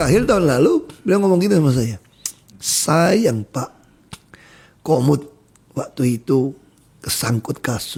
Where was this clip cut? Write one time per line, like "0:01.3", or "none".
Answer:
none